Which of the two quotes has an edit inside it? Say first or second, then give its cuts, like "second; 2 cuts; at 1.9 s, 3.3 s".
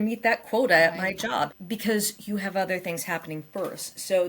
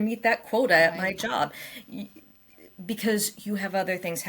first; 1 cut; at 1.6 s